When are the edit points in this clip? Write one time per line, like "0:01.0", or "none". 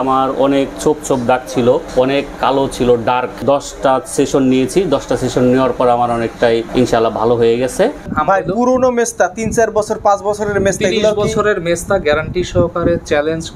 0:01.9
0:03.4
0:06.7
0:08.1